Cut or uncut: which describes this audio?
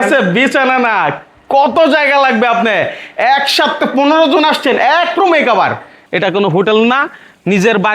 cut